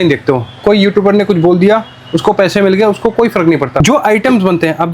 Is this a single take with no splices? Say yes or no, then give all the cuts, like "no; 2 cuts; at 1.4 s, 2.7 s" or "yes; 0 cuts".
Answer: yes; 0 cuts